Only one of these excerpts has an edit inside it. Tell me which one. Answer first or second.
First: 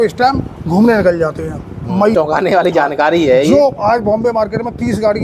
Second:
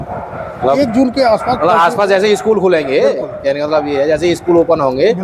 first